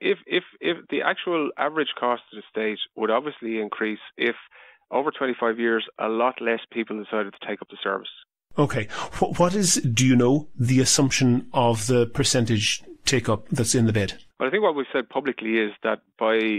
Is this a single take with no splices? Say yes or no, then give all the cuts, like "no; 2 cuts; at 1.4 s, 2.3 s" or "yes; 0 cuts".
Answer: no; 1 cut; at 14.2 s